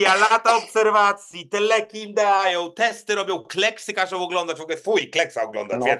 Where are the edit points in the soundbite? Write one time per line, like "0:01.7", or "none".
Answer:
none